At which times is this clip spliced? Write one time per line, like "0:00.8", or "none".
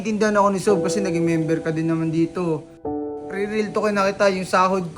0:03.1